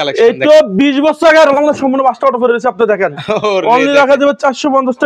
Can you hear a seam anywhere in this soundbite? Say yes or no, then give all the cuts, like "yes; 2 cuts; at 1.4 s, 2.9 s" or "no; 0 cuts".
no; 0 cuts